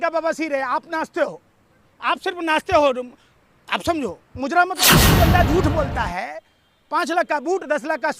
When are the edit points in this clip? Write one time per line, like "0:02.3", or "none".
0:05.0